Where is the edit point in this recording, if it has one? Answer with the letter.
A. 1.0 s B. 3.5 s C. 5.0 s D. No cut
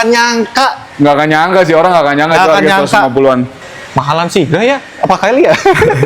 B